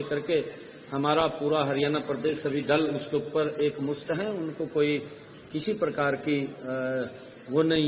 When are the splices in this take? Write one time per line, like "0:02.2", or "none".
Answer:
none